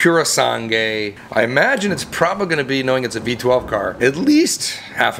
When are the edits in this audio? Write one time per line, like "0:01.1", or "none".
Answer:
0:01.2
0:03.9